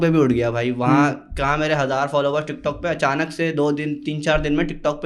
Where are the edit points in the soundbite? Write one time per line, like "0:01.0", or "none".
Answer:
none